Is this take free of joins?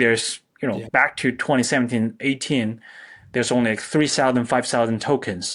yes; 0 cuts

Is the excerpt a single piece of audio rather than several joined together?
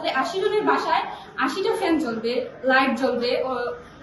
yes; 0 cuts

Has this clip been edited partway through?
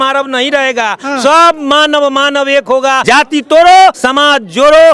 yes; 2 cuts; at 3.0 s, 4.0 s

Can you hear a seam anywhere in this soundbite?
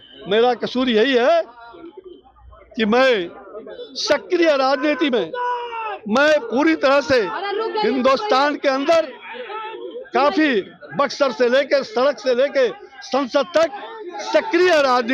no; 0 cuts

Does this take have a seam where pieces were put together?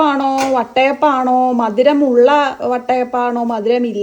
no; 0 cuts

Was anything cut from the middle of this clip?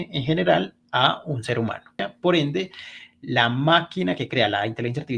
yes; 1 cut; at 2.1 s

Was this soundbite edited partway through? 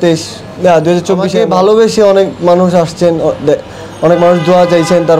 yes; 1 cut; at 1.3 s

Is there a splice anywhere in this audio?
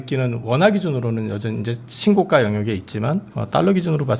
no; 0 cuts

